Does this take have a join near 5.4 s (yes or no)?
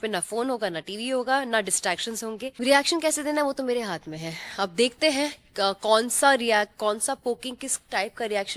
no